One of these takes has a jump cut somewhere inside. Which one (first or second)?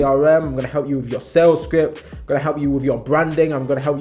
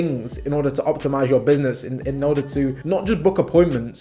second